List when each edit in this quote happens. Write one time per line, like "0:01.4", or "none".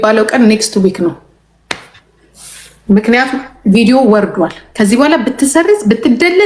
none